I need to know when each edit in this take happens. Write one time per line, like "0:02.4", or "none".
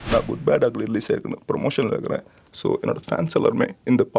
none